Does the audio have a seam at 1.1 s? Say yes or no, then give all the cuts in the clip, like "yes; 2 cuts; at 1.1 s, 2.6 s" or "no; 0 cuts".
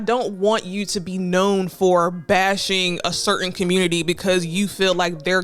no; 0 cuts